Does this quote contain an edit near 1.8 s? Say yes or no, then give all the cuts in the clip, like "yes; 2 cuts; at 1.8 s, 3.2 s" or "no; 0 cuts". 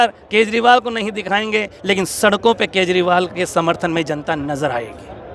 no; 0 cuts